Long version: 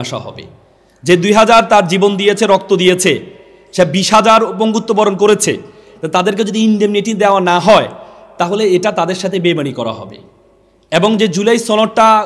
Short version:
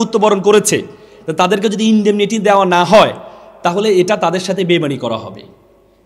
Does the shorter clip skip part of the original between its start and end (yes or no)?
no